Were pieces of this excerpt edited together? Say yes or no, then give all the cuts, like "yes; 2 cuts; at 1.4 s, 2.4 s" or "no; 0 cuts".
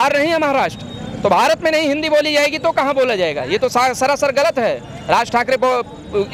no; 0 cuts